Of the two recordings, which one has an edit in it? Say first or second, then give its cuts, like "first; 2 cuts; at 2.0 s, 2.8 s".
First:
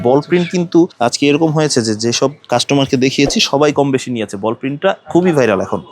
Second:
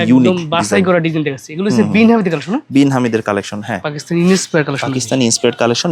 first; 2 cuts; at 0.9 s, 2.4 s